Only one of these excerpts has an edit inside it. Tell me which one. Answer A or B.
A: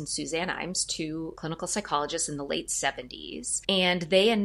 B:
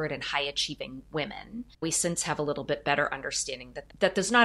B